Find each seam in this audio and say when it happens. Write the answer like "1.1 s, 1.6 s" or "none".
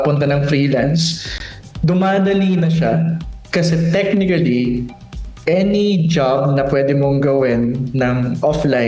none